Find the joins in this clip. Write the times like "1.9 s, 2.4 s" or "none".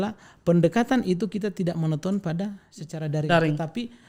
none